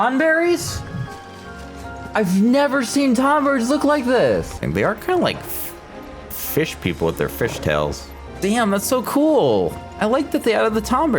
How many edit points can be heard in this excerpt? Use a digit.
2